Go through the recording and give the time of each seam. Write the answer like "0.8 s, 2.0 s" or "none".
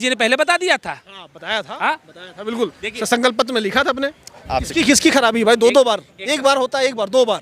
4.3 s